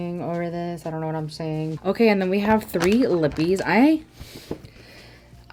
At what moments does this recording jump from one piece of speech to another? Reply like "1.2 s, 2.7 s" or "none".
none